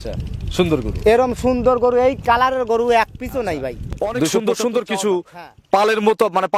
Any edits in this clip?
yes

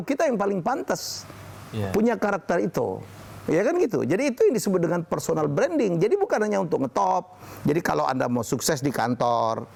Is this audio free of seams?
yes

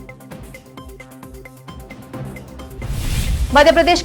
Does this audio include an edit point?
no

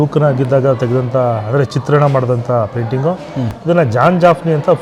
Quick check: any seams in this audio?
no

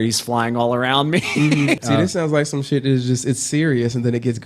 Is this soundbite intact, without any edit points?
no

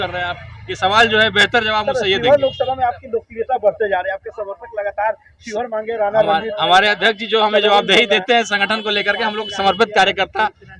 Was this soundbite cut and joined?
no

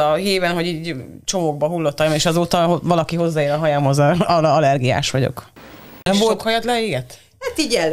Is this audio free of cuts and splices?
no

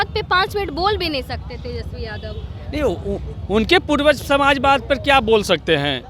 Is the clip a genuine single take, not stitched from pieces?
yes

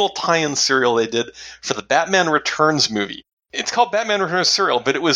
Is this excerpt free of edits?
no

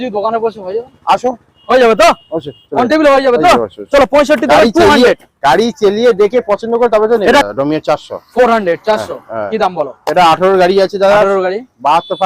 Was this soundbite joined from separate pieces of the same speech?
yes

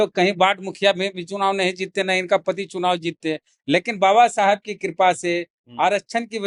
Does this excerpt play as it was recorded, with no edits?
yes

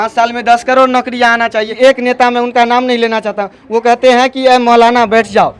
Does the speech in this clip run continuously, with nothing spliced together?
no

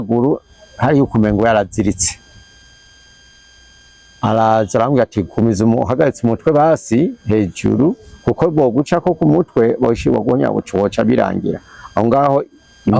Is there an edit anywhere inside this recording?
no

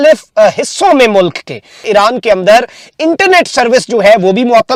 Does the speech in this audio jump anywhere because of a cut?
no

